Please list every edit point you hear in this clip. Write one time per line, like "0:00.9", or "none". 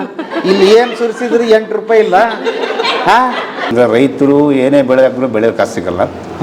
0:03.7